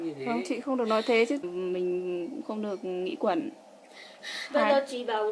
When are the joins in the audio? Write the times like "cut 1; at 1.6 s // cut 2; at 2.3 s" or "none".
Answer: cut 1; at 1.4 s